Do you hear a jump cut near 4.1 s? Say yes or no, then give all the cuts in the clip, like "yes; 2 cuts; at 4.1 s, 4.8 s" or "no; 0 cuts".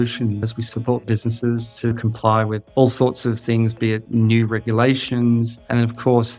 yes; 2 cuts; at 2.6 s, 4.1 s